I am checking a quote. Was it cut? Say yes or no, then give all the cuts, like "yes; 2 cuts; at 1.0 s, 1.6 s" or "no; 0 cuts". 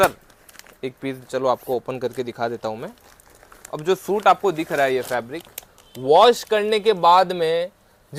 no; 0 cuts